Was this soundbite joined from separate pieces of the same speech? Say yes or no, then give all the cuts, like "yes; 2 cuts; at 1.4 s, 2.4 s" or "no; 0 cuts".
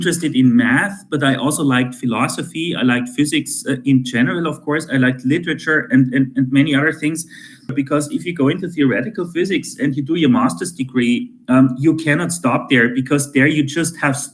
yes; 1 cut; at 7.7 s